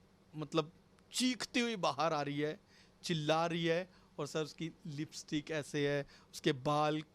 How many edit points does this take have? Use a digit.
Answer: 0